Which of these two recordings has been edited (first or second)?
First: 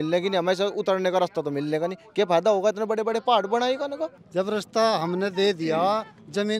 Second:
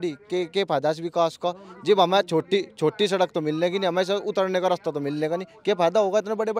first